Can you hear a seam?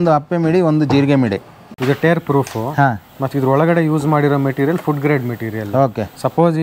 yes; 1 cut; at 1.7 s

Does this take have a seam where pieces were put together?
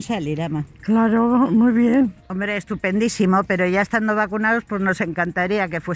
yes; 1 cut; at 2.2 s

